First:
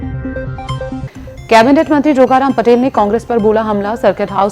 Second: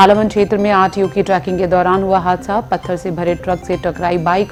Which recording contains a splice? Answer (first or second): first